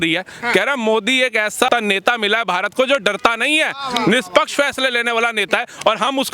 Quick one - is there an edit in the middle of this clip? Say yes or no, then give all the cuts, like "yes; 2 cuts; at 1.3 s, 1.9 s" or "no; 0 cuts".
yes; 1 cut; at 1.7 s